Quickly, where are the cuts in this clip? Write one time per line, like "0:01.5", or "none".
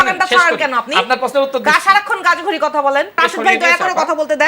0:03.2